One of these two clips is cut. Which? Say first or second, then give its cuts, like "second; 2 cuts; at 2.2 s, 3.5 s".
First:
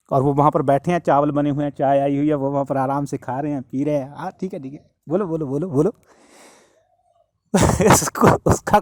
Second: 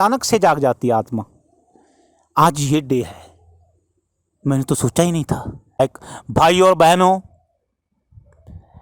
second; 1 cut; at 5.8 s